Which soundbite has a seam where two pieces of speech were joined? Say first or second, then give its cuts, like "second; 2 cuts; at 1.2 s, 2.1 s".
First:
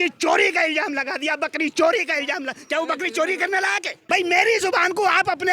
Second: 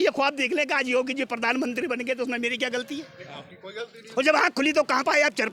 first; 1 cut; at 3.9 s